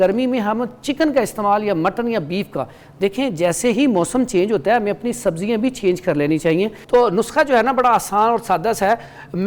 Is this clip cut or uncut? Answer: cut